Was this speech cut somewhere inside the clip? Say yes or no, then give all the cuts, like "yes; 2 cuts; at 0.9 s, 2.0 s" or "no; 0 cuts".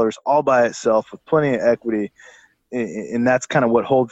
no; 0 cuts